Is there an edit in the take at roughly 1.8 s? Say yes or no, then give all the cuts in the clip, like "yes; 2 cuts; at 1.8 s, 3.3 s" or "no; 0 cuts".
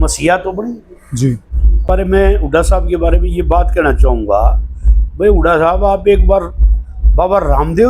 yes; 1 cut; at 1.8 s